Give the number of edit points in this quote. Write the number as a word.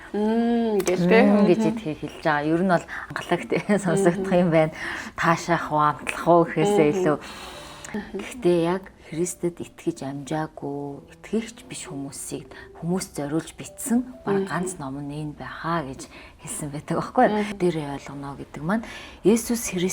three